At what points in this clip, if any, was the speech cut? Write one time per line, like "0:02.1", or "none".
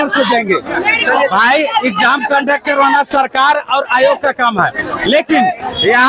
none